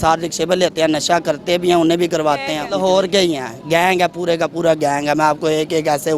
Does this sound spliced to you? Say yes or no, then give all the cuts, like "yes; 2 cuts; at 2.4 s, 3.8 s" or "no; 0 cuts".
yes; 1 cut; at 2.6 s